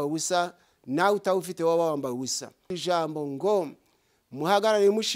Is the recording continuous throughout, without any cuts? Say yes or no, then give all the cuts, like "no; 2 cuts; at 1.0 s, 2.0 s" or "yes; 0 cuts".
no; 1 cut; at 2.7 s